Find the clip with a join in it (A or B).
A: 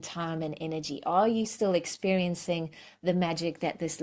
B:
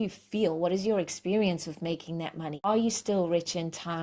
B